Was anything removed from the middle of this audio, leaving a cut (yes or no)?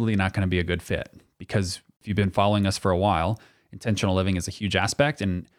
yes